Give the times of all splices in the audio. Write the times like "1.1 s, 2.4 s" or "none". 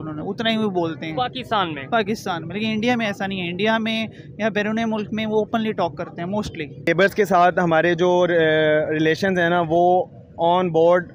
6.9 s